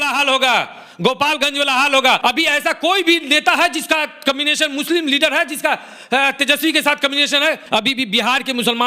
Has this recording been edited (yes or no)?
yes